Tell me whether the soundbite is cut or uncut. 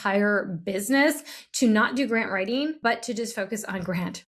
cut